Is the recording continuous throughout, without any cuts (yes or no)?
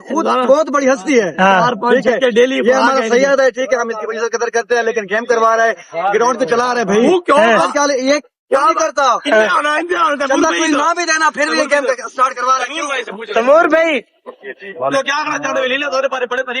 yes